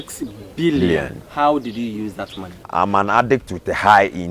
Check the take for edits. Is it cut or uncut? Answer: cut